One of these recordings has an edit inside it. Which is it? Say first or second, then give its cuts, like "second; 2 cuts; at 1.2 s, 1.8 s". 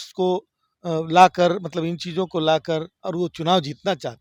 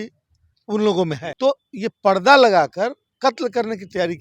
second; 2 cuts; at 1.3 s, 3.0 s